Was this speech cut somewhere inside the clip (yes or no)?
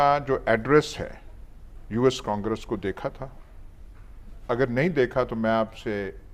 no